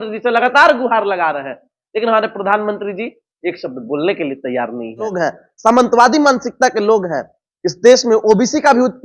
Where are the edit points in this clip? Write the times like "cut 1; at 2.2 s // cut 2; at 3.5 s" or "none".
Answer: cut 1; at 5.1 s